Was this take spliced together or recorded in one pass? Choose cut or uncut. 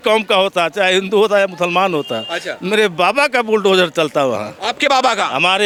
uncut